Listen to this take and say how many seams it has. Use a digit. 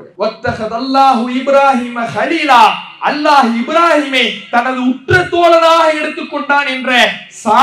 0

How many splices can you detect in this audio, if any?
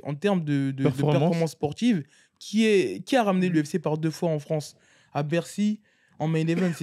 1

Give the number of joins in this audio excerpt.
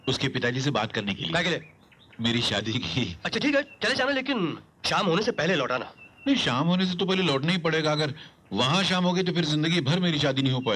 1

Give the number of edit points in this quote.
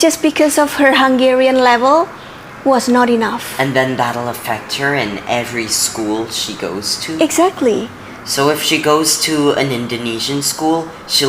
1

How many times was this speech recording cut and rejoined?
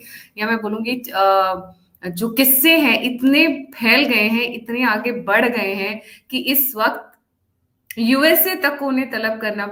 0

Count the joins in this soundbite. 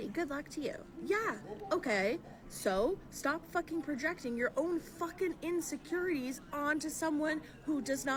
0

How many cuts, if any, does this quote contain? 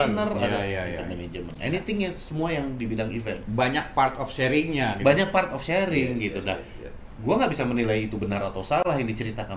0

